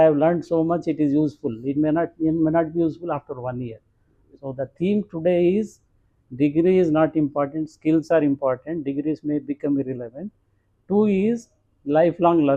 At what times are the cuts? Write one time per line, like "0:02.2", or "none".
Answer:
none

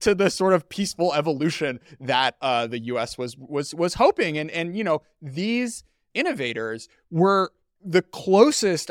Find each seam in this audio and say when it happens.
0:06.1

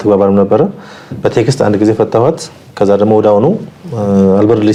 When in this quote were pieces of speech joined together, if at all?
none

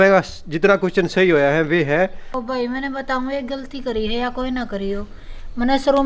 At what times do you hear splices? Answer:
0:02.3

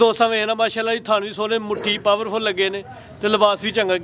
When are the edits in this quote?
none

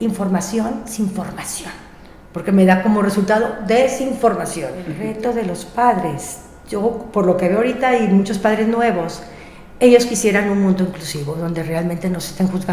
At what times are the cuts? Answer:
0:05.0

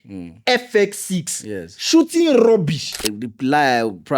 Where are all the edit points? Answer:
0:03.1

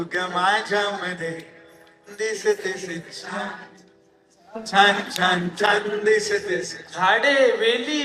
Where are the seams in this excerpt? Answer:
0:06.8

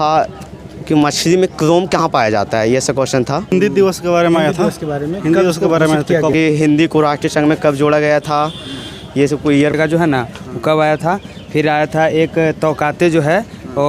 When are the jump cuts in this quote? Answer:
0:03.5
0:06.3
0:09.8

